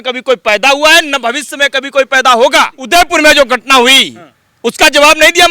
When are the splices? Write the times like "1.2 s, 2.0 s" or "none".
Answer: 2.8 s